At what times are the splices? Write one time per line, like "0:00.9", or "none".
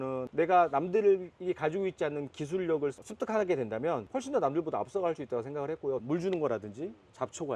0:06.0